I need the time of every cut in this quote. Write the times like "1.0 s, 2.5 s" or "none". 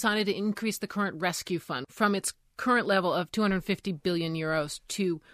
1.8 s